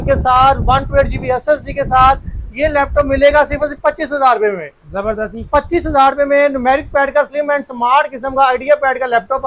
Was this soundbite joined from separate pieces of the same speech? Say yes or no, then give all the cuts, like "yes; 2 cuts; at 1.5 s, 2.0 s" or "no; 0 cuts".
no; 0 cuts